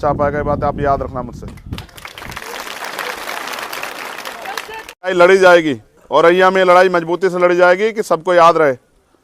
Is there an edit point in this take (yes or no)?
yes